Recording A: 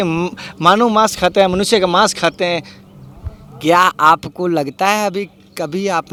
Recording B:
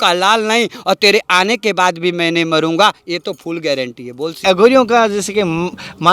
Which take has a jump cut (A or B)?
B